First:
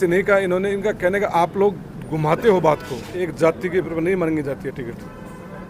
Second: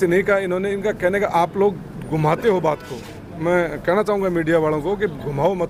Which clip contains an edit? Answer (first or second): first